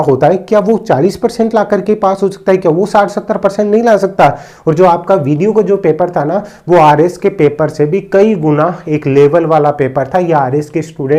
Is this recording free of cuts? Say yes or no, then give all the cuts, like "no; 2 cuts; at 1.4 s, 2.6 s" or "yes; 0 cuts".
yes; 0 cuts